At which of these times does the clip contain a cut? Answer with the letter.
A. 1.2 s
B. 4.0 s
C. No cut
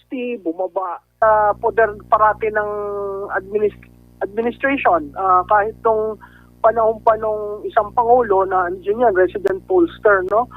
A